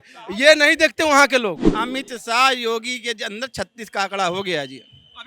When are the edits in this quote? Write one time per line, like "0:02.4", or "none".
0:01.7